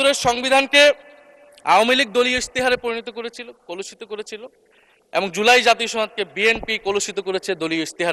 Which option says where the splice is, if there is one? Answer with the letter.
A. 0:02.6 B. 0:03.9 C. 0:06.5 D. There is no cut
D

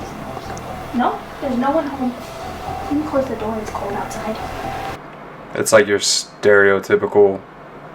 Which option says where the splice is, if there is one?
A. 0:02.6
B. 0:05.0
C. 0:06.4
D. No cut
B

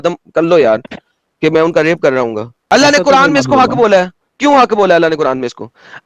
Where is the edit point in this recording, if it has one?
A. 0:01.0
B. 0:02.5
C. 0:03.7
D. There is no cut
B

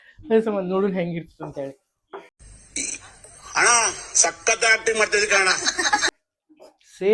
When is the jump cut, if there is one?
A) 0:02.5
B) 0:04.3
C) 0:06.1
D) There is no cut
C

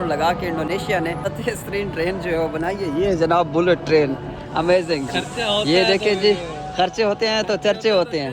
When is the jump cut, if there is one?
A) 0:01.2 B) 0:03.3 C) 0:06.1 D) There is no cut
A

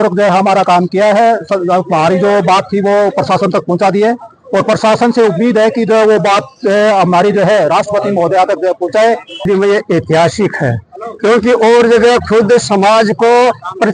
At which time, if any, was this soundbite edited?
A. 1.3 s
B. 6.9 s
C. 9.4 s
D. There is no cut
C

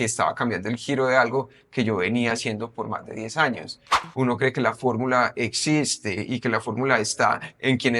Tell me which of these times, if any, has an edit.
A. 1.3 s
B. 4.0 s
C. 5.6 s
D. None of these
B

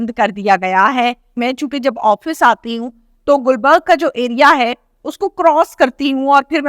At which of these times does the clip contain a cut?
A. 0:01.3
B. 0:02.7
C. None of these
A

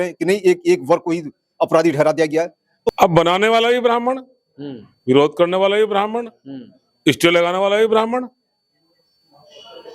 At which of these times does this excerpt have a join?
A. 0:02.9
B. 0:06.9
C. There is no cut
A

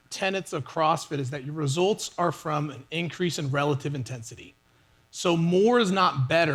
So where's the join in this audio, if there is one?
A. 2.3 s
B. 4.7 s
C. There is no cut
C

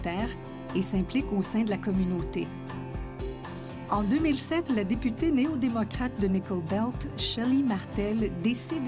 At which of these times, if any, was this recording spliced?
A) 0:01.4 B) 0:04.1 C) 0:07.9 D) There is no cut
C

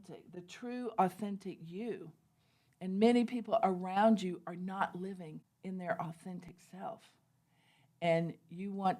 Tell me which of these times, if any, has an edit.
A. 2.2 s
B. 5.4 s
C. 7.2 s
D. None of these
B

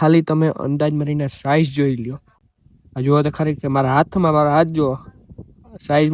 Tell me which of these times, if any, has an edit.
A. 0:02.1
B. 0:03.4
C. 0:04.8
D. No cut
A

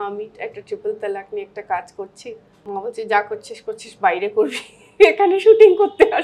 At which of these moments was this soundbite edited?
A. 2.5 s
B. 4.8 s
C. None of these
A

